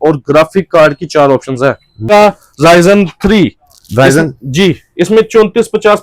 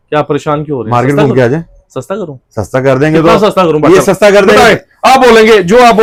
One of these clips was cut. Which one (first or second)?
first